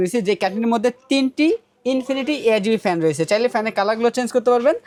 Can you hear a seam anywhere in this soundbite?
no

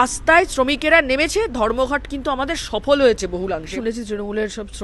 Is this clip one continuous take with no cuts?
no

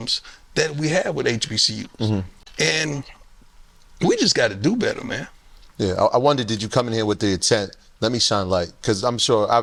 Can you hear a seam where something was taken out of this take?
no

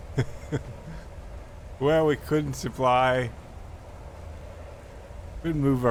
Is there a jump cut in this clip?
no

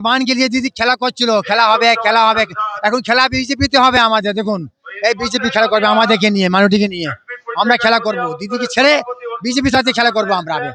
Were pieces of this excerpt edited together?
no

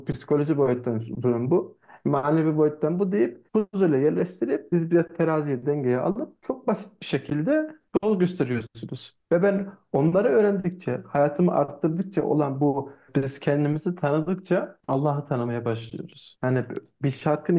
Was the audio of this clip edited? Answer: yes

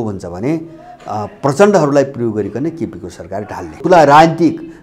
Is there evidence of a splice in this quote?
yes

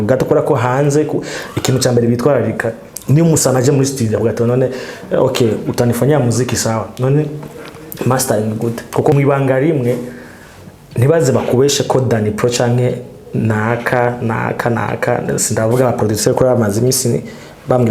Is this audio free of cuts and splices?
no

